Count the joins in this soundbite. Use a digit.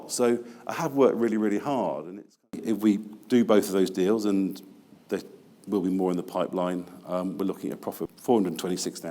2